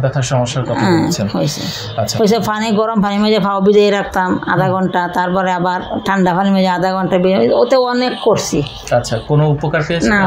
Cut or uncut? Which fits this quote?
uncut